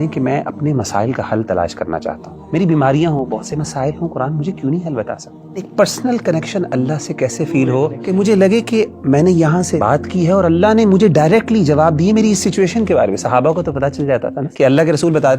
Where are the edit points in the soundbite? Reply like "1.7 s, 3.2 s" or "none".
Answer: 2.3 s, 5.7 s, 8.0 s, 9.8 s, 14.4 s